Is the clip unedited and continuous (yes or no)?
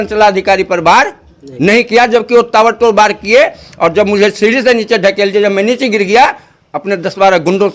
yes